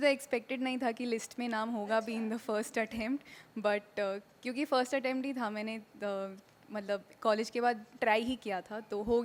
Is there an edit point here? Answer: no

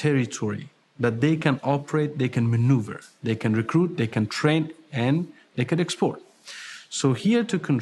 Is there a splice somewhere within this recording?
no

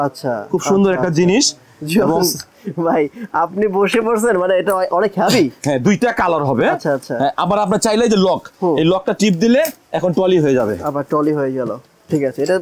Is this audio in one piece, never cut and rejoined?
yes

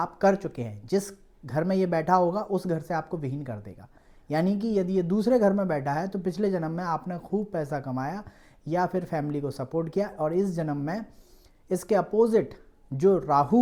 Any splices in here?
no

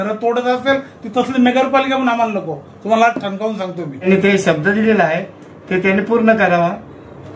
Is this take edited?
yes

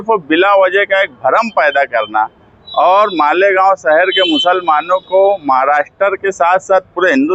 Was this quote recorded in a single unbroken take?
yes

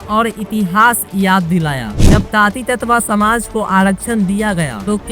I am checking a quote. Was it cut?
yes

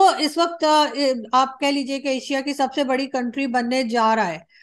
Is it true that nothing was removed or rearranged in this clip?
yes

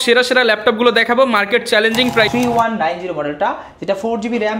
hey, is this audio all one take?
no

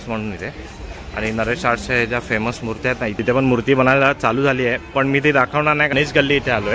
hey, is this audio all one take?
no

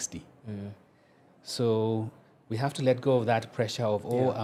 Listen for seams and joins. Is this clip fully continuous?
yes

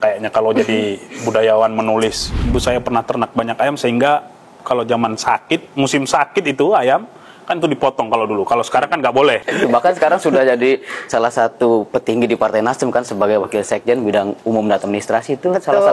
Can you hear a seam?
yes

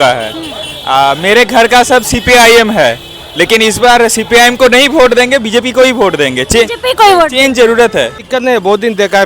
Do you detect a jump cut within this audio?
yes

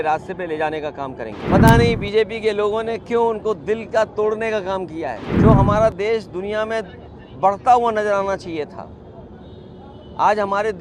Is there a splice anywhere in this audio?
yes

